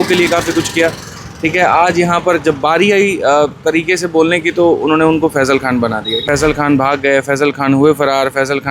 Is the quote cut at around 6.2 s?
yes; 1 cut; at 6.2 s

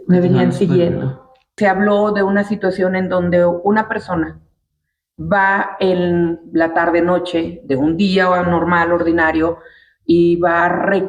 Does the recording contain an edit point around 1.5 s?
yes; 1 cut; at 1.5 s

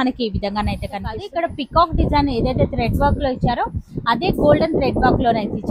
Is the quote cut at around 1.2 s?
yes; 1 cut; at 1.2 s

